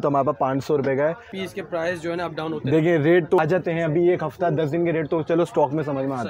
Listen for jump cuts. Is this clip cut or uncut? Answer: cut